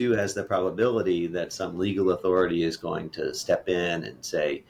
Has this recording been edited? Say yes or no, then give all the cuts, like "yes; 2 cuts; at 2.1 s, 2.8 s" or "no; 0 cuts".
no; 0 cuts